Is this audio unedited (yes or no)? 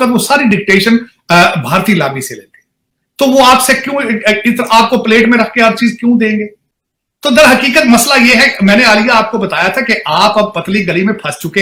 yes